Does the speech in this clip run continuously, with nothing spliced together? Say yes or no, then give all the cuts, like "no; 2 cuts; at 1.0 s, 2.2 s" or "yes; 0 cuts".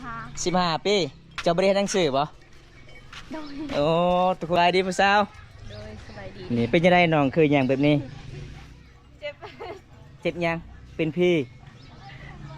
no; 2 cuts; at 1.2 s, 4.6 s